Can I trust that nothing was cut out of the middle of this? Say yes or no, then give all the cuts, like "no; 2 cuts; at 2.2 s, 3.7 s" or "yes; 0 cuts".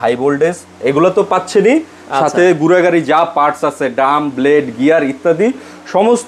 yes; 0 cuts